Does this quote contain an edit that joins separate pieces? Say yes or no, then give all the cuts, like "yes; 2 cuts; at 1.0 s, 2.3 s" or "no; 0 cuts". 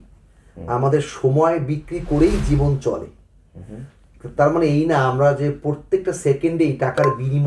no; 0 cuts